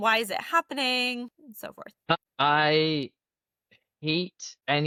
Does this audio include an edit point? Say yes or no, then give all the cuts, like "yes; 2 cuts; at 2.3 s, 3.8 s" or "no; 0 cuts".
no; 0 cuts